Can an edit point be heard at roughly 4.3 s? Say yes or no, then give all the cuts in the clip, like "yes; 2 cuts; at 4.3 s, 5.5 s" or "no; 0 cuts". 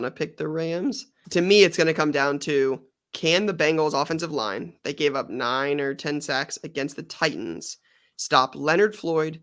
no; 1 cut; at 1.1 s